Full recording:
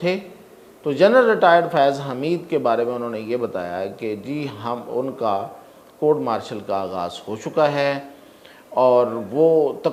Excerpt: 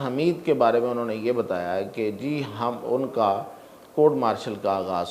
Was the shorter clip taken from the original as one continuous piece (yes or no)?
yes